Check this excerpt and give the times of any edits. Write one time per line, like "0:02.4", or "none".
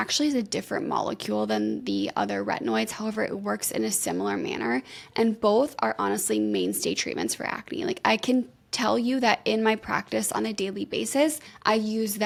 none

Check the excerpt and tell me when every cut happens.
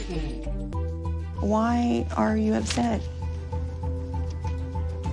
none

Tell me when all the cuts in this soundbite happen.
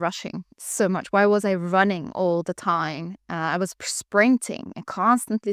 none

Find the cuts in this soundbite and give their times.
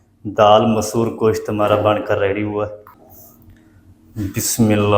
0:02.9

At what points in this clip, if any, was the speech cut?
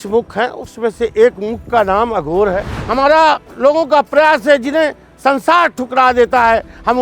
0:02.7

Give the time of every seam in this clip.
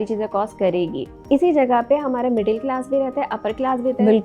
0:01.2

